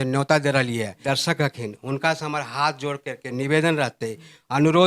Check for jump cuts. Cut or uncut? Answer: cut